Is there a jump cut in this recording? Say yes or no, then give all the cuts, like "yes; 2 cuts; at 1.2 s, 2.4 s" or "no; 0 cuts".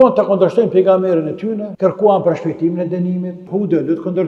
yes; 2 cuts; at 1.7 s, 3.5 s